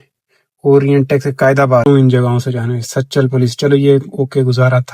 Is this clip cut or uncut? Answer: cut